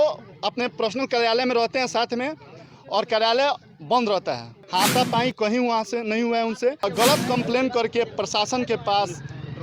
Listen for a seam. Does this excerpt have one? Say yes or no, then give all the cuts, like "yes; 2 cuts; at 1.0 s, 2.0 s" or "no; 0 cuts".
yes; 2 cuts; at 4.5 s, 6.9 s